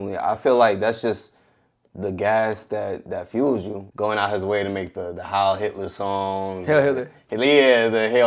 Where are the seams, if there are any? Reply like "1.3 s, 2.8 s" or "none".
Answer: 3.8 s